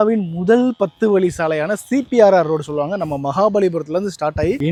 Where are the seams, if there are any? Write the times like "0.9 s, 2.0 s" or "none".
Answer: none